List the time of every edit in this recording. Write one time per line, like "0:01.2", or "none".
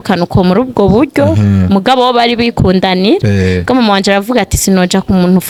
none

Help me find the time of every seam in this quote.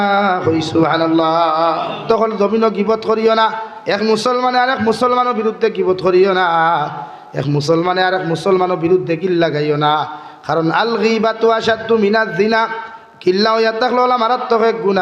0:02.0

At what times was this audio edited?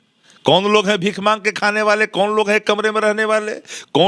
none

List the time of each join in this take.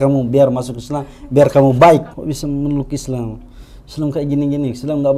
0:02.1

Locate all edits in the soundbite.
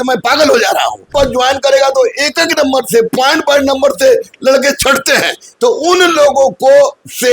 0:01.1

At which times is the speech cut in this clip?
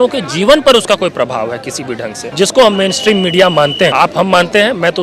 0:02.2
0:03.9

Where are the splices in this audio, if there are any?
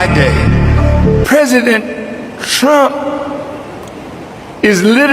0:01.2

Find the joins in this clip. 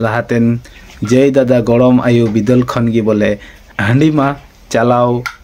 0:03.7

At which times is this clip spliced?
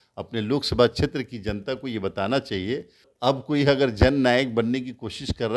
0:03.1

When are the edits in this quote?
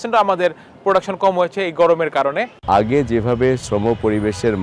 0:02.5

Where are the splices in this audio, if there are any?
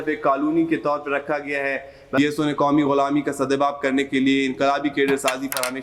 0:02.2

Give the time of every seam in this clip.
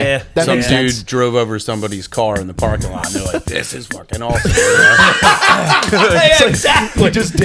none

